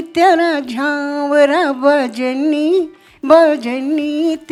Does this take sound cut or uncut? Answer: uncut